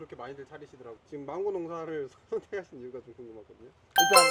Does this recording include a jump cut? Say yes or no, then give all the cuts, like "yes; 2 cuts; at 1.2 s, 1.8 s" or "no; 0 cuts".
no; 0 cuts